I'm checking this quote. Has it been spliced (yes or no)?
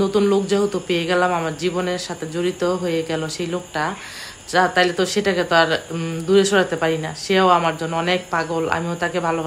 no